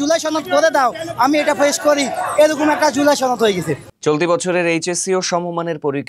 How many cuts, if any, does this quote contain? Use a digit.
1